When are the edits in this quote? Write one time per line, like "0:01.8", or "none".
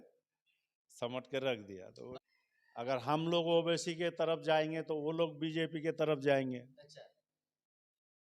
0:02.0